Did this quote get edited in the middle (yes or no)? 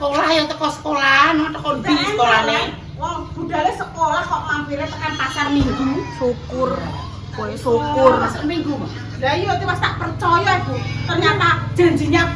no